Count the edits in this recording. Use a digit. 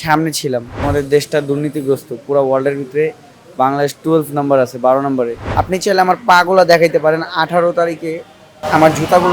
2